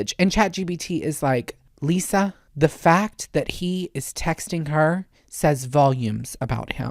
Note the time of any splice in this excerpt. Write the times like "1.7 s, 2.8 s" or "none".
2.4 s